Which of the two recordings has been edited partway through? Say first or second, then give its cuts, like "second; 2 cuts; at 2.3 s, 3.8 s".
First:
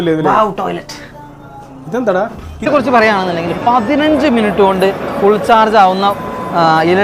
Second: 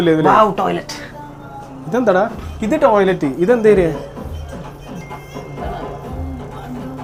first; 1 cut; at 2.7 s